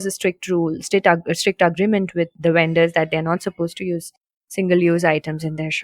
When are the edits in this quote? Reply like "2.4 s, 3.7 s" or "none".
2.3 s